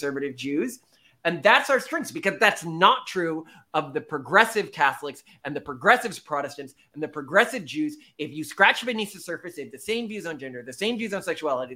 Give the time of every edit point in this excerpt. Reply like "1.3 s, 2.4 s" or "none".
none

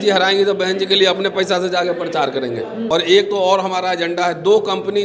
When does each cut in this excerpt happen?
2.9 s

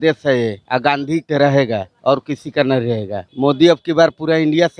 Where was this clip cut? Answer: none

